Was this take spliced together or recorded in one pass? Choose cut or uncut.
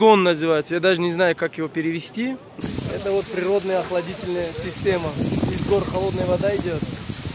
cut